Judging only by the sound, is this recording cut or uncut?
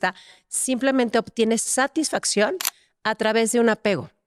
uncut